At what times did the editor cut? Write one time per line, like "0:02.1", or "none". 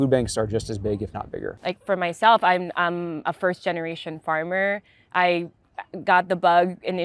0:01.5